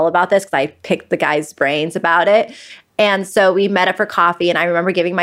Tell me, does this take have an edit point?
yes; 1 cut; at 2.7 s

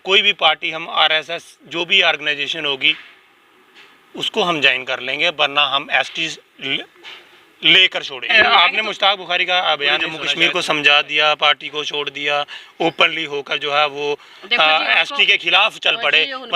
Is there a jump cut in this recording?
yes; 2 cuts; at 8.3 s, 10.2 s

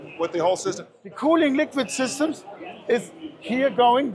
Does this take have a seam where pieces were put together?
yes; 1 cut; at 0.9 s

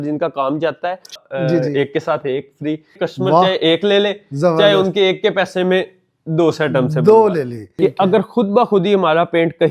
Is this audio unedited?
no; 3 cuts; at 1.2 s, 3.0 s, 7.6 s

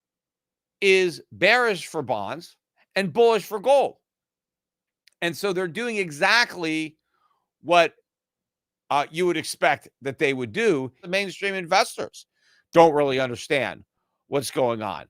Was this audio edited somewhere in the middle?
yes; 1 cut; at 11.0 s

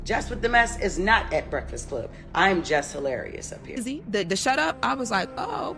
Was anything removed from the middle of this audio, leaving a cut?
yes; 1 cut; at 3.8 s

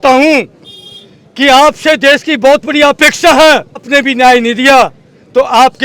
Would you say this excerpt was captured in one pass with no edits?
no; 1 cut; at 3.9 s

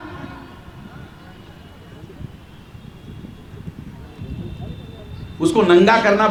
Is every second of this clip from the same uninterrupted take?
yes; 0 cuts

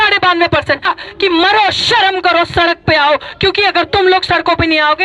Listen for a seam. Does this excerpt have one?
yes; 1 cut; at 0.9 s

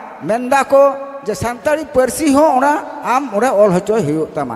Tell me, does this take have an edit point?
no; 0 cuts

